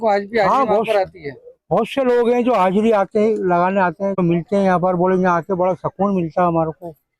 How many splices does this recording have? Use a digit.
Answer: 1